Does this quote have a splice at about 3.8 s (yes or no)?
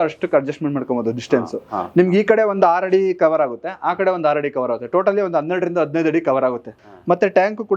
no